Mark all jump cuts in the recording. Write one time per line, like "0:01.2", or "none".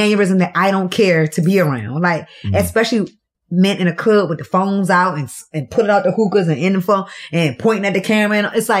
none